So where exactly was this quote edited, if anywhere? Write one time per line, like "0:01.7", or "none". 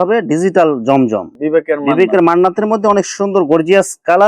0:01.3